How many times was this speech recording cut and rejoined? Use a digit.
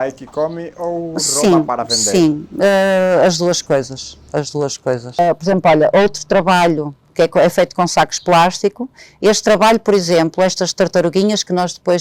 1